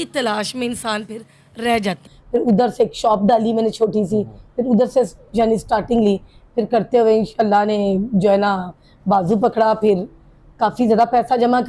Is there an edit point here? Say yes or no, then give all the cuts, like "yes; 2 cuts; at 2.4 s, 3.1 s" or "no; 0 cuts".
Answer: yes; 1 cut; at 2.1 s